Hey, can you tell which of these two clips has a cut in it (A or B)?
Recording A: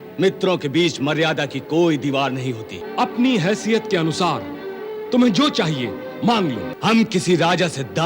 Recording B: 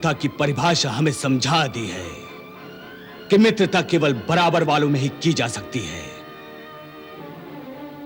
A